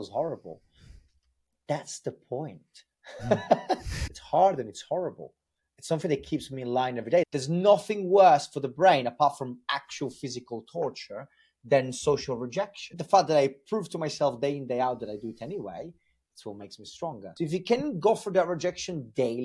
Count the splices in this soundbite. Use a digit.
4